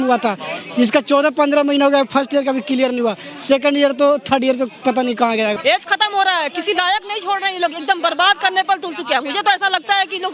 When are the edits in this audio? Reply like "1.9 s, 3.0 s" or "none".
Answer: 5.6 s